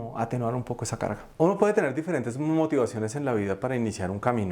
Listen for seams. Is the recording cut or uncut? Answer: cut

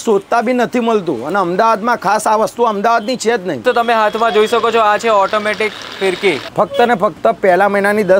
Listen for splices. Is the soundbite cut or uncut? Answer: cut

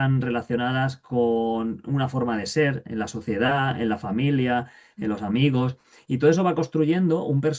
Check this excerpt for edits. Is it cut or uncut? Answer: uncut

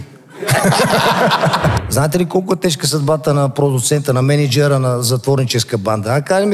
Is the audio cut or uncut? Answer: cut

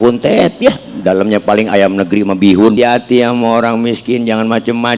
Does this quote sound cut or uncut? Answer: cut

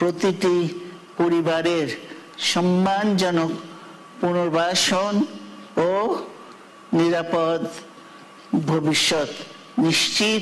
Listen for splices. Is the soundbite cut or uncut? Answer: uncut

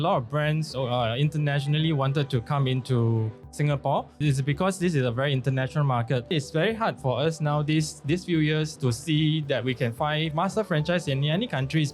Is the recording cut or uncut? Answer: cut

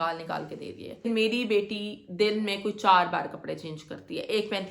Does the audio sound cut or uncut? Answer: cut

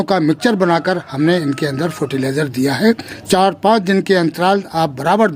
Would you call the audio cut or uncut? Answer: cut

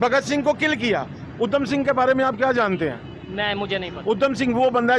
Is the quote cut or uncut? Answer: uncut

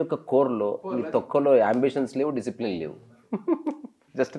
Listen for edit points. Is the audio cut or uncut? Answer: uncut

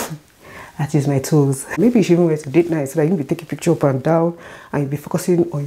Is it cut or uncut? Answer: cut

